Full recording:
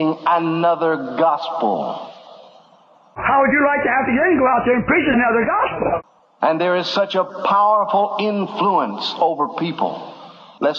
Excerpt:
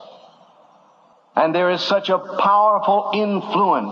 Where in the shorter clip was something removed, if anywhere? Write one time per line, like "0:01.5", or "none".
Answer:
0:00.9